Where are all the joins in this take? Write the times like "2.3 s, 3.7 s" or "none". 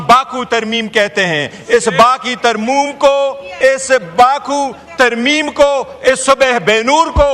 3.4 s